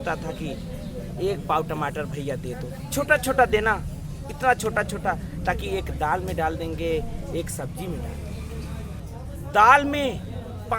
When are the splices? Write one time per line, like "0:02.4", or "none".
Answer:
0:09.0